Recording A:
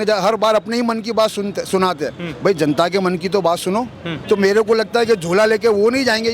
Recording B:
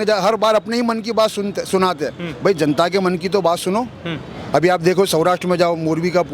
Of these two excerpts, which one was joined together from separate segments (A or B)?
A